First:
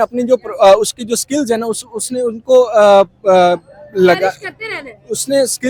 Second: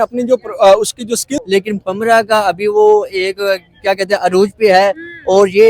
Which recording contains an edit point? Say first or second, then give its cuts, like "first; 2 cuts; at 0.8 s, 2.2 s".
second; 1 cut; at 1.4 s